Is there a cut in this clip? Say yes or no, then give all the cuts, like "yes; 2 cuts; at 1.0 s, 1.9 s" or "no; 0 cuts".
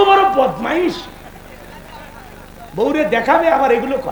no; 0 cuts